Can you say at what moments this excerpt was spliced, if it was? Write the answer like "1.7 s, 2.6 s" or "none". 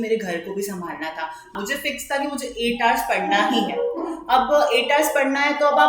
1.5 s